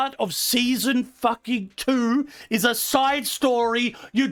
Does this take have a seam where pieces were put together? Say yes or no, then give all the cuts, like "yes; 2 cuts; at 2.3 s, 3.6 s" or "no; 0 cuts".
no; 0 cuts